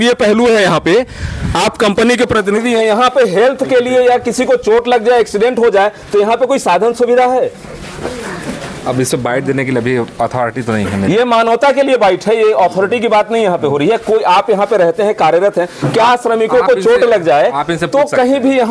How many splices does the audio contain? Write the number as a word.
zero